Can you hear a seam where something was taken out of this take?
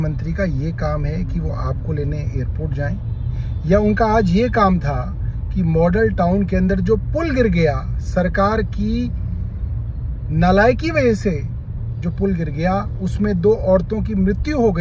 no; 0 cuts

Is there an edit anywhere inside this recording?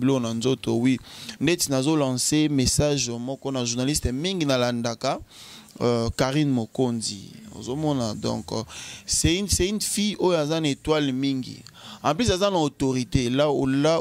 yes; 1 cut; at 1.2 s

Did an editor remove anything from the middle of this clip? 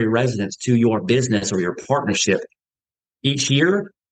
no; 0 cuts

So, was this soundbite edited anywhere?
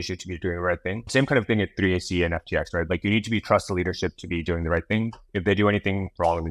yes; 1 cut; at 1.1 s

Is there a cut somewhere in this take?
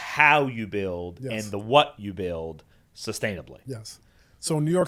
no; 0 cuts

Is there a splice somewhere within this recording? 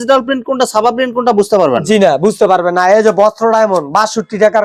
no; 0 cuts

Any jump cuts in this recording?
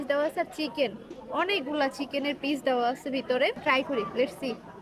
yes; 1 cut; at 3.6 s

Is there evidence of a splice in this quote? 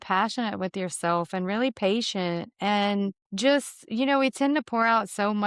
yes; 1 cut; at 3.2 s

